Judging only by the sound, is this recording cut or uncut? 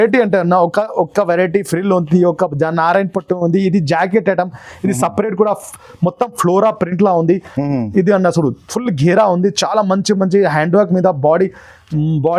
uncut